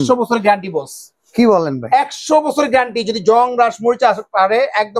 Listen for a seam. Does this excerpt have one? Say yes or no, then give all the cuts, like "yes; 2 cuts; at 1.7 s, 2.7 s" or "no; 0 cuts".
no; 0 cuts